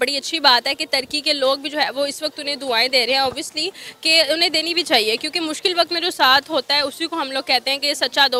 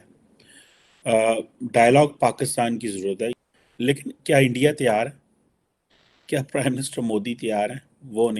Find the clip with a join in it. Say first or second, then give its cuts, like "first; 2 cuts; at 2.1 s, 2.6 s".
second; 1 cut; at 3.3 s